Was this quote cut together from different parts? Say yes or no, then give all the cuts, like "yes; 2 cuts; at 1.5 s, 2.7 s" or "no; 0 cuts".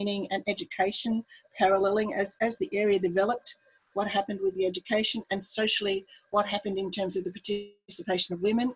no; 0 cuts